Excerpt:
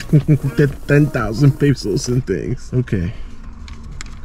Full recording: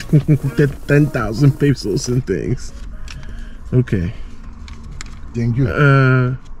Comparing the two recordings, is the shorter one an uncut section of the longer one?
no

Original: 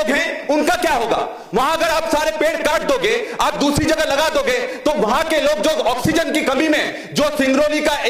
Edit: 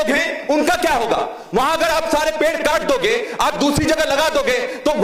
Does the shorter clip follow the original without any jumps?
yes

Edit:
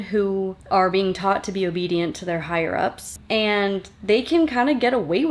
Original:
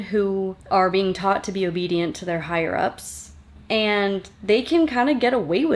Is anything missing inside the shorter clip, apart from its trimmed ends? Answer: yes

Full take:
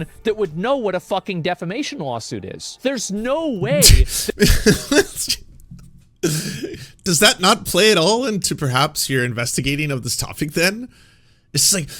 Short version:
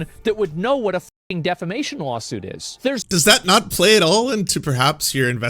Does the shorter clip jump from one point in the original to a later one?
yes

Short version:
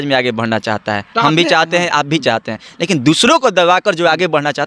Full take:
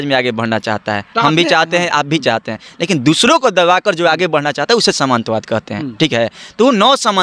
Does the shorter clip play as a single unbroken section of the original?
yes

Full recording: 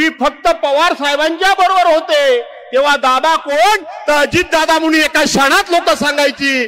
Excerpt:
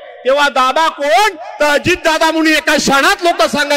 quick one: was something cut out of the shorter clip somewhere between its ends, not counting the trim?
no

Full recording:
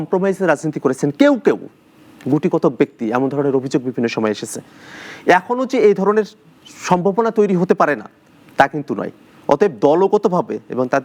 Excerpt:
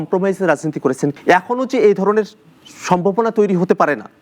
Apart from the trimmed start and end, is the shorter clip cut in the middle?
yes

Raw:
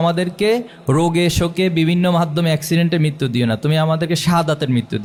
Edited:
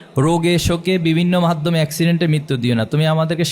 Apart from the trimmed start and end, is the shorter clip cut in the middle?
no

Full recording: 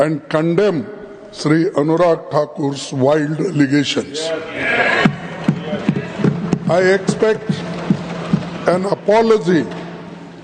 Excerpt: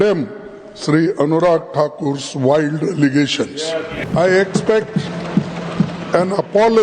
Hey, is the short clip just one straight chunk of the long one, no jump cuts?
no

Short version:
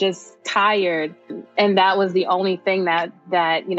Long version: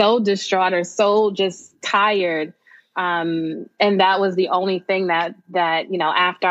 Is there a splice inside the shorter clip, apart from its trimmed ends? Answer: yes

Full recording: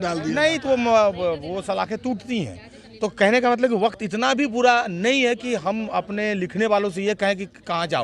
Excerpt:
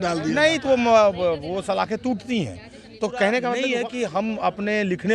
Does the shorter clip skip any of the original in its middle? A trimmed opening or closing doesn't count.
yes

